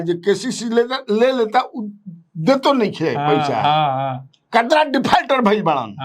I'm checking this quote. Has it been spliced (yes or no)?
no